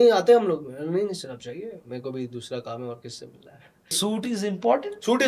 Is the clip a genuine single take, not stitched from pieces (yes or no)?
no